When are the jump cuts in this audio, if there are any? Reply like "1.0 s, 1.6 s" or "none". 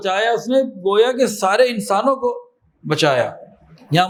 none